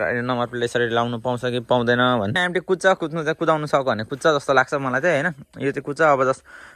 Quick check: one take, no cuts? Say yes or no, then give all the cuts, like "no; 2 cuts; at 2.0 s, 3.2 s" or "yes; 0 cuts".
no; 1 cut; at 2.4 s